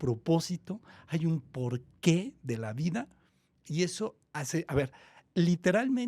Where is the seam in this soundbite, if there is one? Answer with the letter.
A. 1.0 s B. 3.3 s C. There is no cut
C